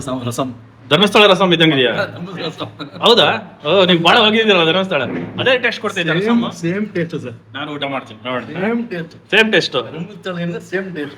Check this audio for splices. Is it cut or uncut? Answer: uncut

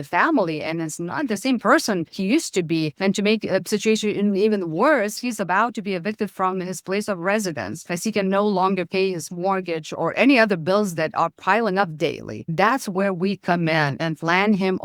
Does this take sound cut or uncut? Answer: cut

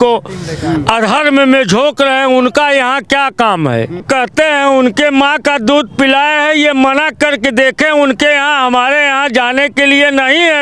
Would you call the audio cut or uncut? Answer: cut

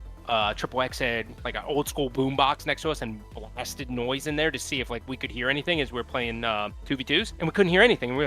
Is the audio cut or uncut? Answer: cut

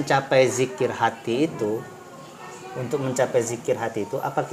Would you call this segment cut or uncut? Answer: uncut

